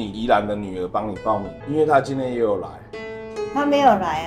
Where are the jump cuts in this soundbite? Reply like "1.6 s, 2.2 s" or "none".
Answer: 1.5 s